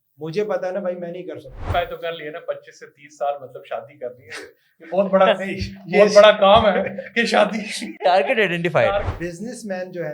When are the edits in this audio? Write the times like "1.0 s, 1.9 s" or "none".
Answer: 1.7 s, 9.1 s